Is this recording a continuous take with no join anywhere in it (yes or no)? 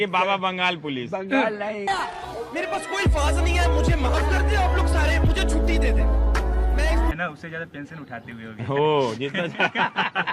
no